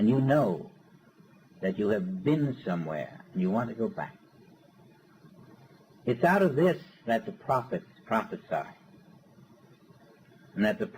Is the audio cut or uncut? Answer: cut